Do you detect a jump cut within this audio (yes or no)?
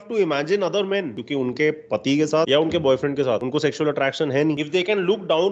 yes